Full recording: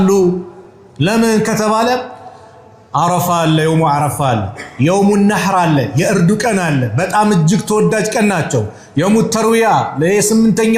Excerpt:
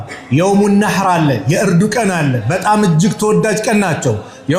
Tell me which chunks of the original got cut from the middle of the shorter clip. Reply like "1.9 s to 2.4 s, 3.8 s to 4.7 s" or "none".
none